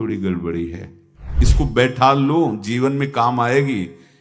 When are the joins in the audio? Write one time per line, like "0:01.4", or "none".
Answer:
0:01.4